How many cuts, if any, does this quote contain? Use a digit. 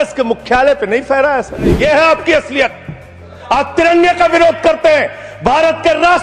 1